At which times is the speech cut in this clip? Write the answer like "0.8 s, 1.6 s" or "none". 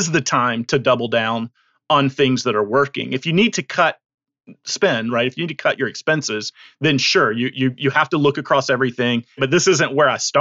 9.4 s